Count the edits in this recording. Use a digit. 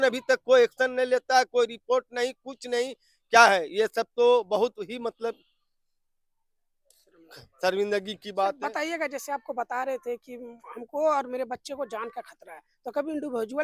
0